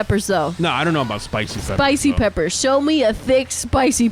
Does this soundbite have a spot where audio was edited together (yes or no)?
no